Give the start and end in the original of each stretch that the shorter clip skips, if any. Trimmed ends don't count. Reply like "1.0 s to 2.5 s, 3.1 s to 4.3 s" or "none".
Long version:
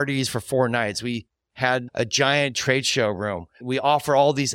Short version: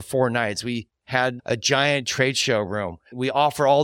1.3 s to 1.4 s